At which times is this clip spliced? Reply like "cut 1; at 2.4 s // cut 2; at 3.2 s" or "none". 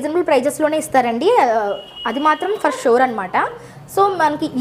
none